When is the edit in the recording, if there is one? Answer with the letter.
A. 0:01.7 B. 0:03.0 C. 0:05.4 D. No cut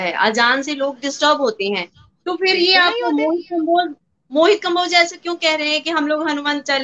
D